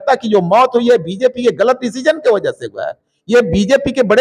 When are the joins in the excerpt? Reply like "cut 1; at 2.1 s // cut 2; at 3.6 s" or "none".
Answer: none